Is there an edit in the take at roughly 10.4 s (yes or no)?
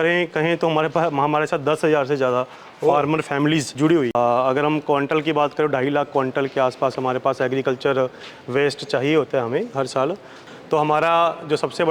yes